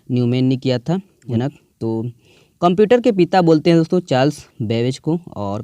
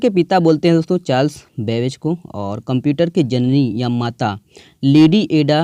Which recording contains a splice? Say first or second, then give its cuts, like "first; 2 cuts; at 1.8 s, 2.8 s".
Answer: first; 1 cut; at 1.4 s